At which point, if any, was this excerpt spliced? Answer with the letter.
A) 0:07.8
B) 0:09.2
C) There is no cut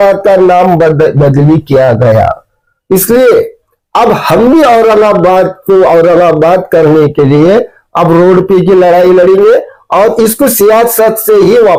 C